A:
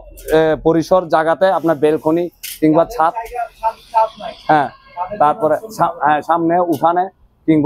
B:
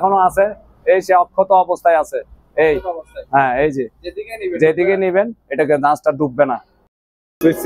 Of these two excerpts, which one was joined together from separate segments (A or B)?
B